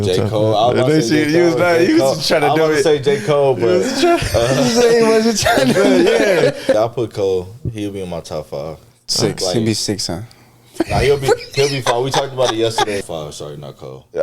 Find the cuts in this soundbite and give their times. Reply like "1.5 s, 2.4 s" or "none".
6.8 s, 13.0 s